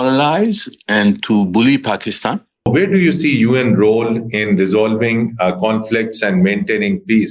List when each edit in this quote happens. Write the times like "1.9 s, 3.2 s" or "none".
2.7 s